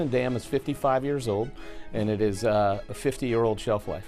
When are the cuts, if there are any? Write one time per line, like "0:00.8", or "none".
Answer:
0:02.8